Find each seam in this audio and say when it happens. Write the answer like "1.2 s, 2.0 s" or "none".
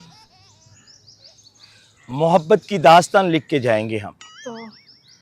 4.3 s